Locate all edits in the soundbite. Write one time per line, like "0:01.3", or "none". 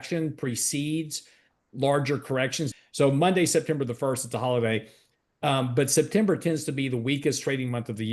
0:02.6